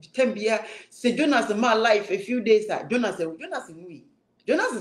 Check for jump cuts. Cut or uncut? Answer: uncut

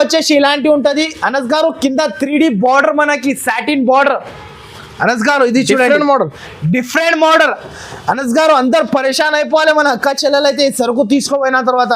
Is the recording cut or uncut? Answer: uncut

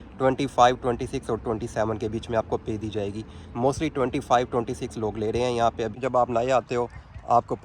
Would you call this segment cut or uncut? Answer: cut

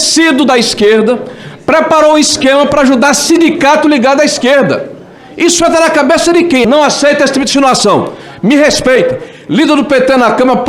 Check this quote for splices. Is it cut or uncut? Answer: cut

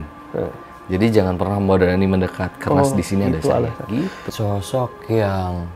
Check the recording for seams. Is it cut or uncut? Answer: cut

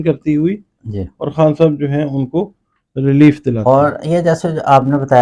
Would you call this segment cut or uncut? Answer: cut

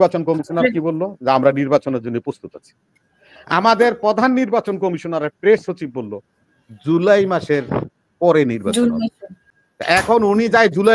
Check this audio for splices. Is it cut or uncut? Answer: cut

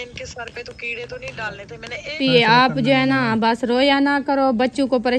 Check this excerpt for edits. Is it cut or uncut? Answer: cut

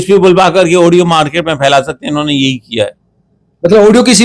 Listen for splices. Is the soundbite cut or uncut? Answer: uncut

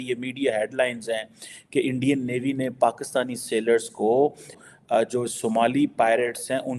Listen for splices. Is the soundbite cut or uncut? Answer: cut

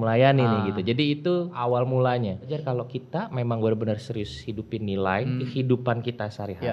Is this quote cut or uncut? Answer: cut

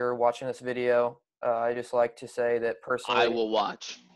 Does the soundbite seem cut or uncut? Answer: uncut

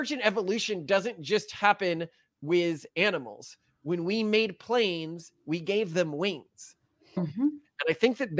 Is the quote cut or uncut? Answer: cut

